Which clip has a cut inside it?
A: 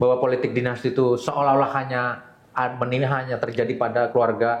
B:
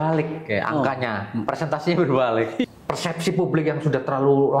B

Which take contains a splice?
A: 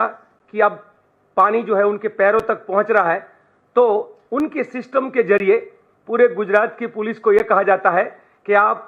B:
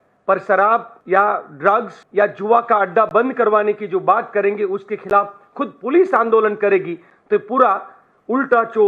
B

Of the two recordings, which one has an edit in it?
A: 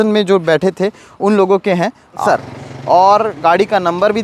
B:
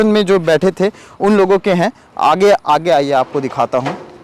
A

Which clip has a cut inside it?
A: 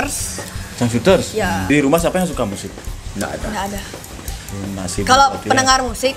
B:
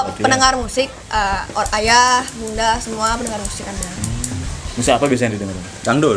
A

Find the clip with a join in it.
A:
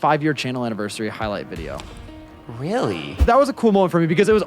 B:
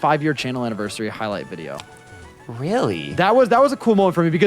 A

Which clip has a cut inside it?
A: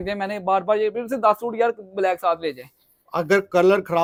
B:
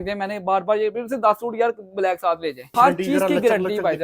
B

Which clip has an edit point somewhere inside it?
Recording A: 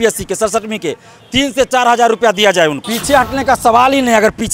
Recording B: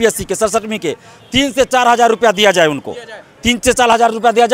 A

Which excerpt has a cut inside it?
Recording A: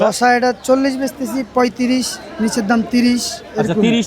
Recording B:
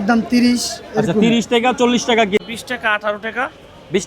B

